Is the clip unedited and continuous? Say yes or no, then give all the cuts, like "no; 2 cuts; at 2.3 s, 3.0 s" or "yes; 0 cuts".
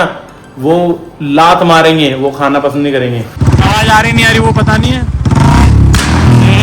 no; 1 cut; at 3.4 s